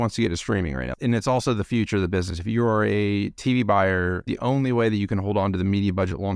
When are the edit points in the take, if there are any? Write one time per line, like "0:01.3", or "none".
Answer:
0:01.0
0:04.3